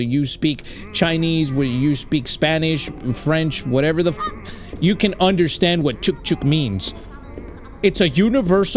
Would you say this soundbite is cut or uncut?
uncut